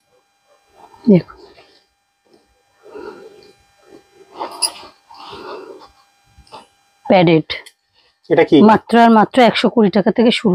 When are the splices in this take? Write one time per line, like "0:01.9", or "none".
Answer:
none